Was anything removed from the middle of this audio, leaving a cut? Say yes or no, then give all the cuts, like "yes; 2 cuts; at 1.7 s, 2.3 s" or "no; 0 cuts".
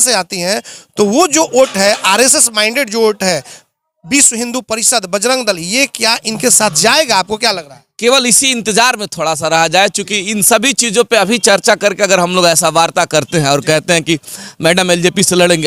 no; 0 cuts